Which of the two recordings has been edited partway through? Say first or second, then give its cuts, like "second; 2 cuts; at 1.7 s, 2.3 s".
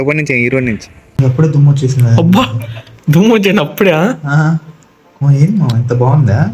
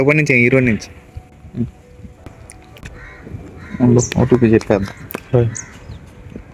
first; 1 cut; at 1.0 s